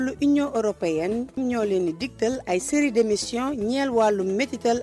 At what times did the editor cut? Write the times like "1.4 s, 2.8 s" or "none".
1.4 s